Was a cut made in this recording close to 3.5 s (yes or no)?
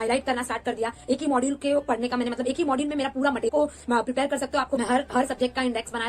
yes